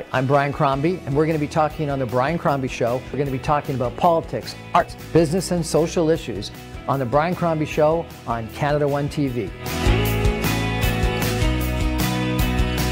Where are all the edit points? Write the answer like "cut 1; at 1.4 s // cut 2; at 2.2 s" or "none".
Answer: cut 1; at 5.0 s